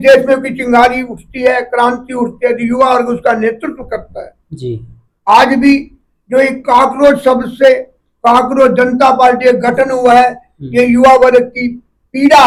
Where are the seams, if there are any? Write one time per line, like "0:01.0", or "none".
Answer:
none